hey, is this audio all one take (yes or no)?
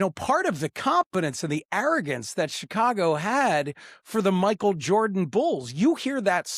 yes